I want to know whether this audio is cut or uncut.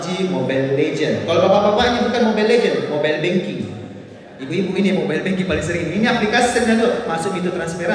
uncut